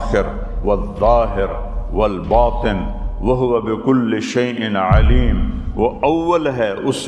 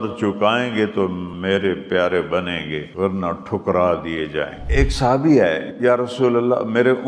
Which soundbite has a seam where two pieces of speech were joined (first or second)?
second